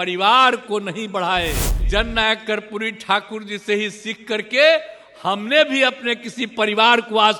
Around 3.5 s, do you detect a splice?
no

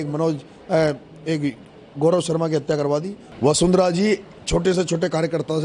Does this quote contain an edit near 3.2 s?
yes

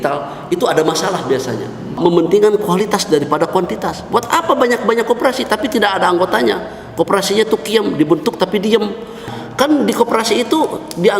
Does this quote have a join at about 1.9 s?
yes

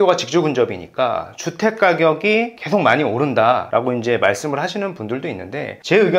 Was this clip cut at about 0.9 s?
no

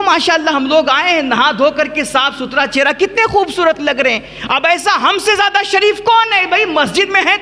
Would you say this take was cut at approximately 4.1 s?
no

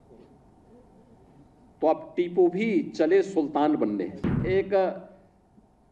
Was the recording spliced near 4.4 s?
yes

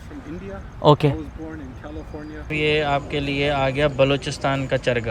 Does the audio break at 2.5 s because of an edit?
yes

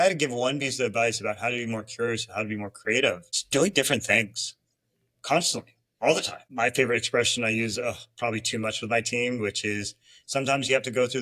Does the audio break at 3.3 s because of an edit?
yes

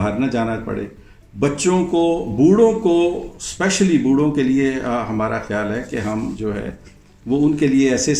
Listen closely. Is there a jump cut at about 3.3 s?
no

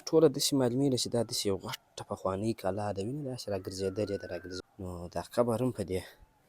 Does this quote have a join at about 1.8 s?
no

